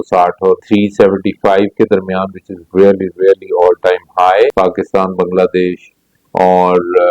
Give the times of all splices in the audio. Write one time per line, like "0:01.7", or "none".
0:04.5

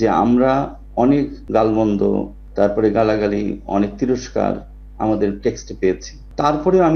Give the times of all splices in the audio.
0:01.4

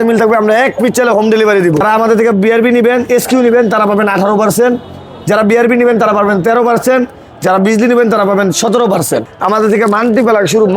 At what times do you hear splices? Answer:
0:01.8
0:09.3

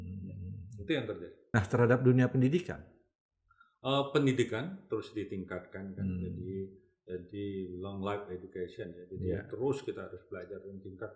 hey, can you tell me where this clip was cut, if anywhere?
0:01.4

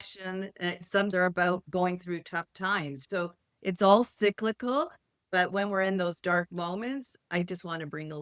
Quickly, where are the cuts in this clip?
0:01.1
0:03.0

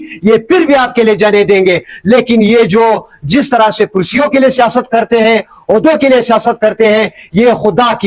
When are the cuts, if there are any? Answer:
none

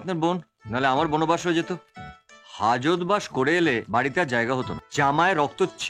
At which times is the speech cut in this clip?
0:04.8

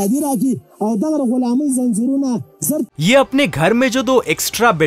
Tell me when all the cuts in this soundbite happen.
0:02.9

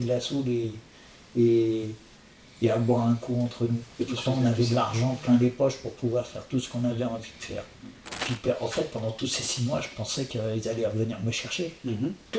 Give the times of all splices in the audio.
0:08.3

